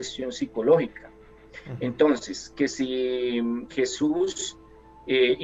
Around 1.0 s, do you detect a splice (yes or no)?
no